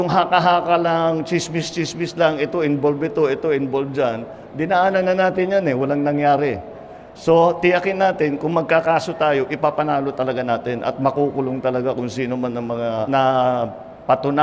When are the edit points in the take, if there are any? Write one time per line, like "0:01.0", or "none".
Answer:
0:13.1

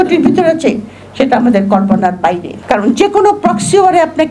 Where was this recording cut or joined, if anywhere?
0:02.5

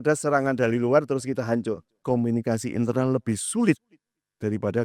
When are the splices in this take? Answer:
0:02.0

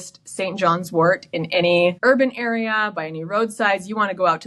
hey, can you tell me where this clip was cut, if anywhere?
0:02.0

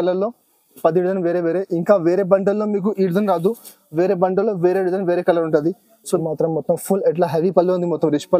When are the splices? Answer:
0:06.2

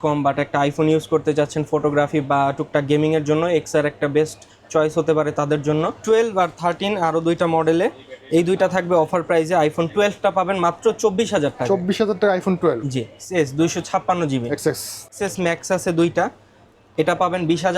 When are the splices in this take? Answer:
0:06.0
0:13.1
0:15.0

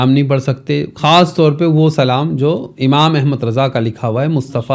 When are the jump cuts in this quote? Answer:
none

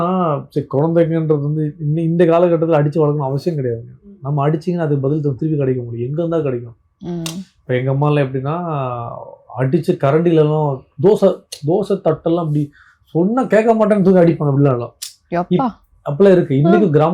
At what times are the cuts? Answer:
none

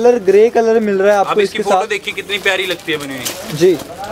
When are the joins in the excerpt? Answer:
none

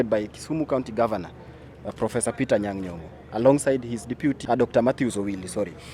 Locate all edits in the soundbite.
0:04.4

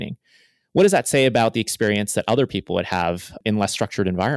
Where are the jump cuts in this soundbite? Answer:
0:03.4

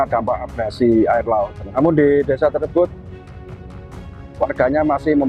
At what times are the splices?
0:01.6

